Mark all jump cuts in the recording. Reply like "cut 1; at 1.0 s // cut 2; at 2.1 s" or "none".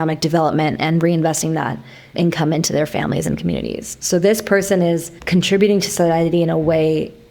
cut 1; at 5.1 s